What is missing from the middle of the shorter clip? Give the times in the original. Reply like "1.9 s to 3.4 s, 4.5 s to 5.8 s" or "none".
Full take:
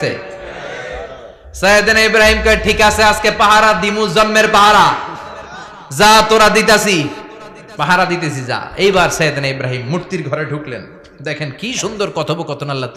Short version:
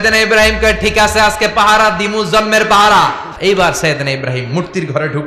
5.1 s to 8.6 s